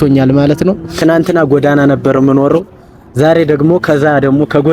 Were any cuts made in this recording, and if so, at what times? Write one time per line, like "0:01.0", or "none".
0:00.9